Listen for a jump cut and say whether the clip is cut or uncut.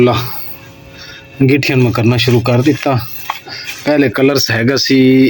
uncut